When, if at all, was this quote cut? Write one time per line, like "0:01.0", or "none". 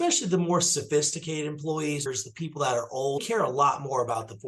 0:02.0
0:03.2